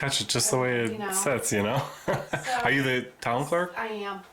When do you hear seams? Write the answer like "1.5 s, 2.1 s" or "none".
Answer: none